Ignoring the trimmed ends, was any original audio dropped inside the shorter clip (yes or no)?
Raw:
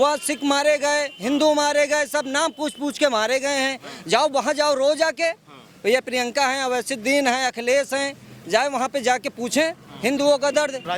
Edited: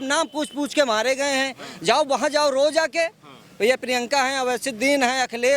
no